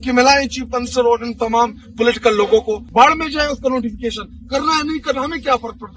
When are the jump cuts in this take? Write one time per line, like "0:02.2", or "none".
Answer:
0:02.8